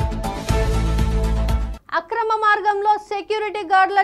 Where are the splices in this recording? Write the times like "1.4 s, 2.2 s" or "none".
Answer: 1.7 s